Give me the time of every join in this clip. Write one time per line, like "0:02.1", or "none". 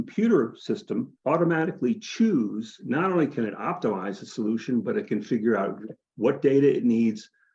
0:01.1
0:02.8